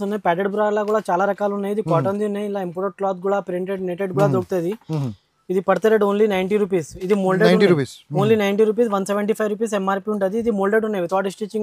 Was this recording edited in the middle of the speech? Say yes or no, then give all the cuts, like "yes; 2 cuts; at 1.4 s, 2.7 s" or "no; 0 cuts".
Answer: no; 0 cuts